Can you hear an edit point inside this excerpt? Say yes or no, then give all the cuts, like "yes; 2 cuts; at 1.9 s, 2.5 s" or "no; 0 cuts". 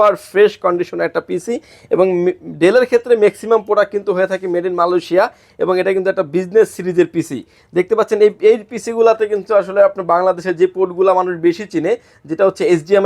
no; 0 cuts